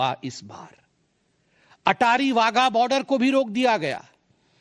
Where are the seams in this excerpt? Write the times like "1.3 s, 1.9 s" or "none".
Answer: none

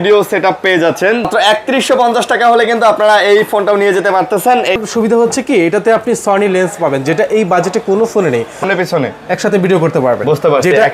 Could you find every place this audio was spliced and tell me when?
1.3 s, 4.8 s, 8.6 s

